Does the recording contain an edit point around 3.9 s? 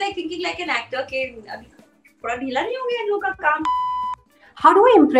yes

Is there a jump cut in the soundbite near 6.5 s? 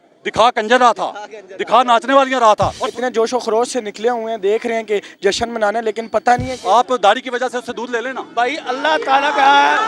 yes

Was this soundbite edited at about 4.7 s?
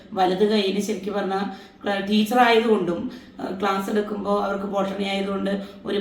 no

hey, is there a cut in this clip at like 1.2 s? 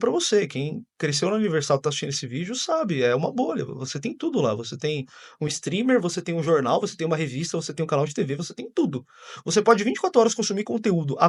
no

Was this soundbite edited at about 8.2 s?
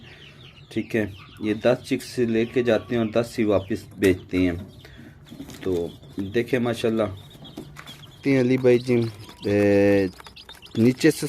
yes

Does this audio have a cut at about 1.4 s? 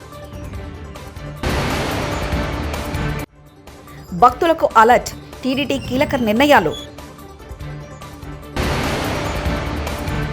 yes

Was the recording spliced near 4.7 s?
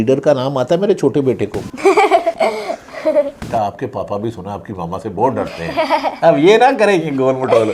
no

